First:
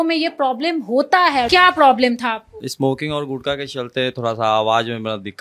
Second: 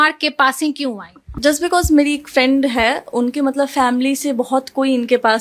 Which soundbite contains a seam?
first; 2 cuts; at 1.5 s, 2.7 s

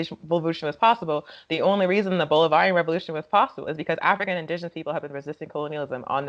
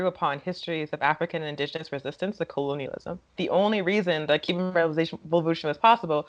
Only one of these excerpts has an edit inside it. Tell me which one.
second; 1 cut; at 3.4 s

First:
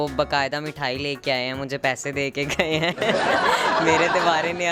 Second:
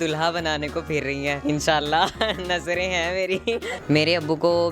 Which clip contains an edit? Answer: second; 2 cuts; at 1.4 s, 3.7 s

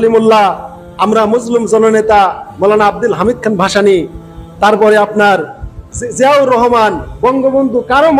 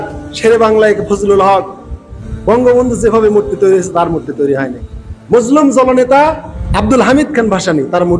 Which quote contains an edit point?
second; 1 cut; at 6.5 s

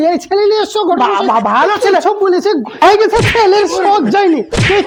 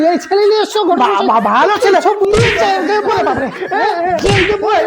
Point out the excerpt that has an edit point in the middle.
second; 1 cut; at 2.3 s

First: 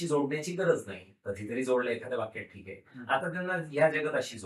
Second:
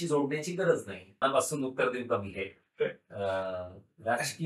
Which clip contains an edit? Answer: second; 1 cut; at 1.2 s

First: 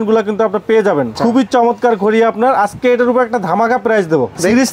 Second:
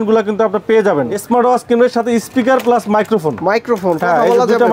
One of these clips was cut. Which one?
second; 1 cut; at 1.1 s

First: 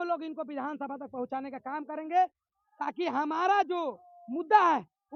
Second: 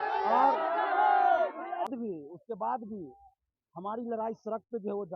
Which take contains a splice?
second; 1 cut; at 1.9 s

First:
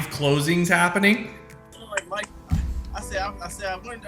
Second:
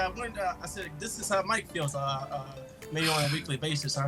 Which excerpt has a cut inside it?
first; 1 cut; at 1.8 s

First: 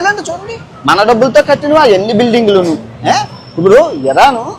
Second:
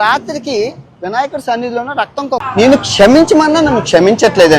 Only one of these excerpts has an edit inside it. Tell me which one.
second; 1 cut; at 2.5 s

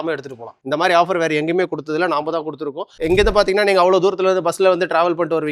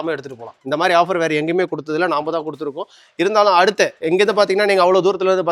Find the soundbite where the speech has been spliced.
first; 1 cut; at 3.0 s

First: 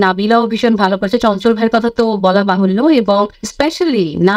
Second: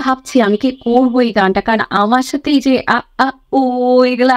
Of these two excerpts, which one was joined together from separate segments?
first; 1 cut; at 3.4 s

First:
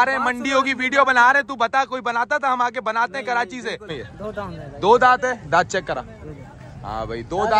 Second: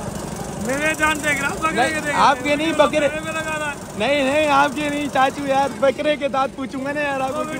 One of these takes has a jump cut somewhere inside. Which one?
first; 1 cut; at 4.0 s

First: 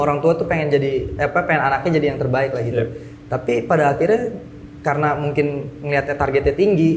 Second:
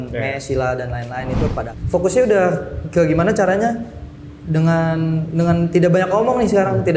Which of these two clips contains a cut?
second; 1 cut; at 1.7 s

